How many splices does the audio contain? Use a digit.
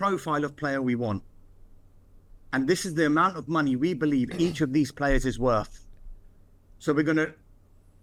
0